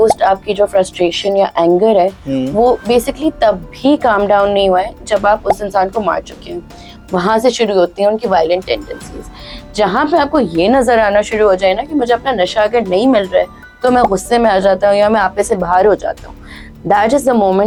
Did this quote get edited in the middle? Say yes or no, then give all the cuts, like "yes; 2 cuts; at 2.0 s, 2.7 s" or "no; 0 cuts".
no; 0 cuts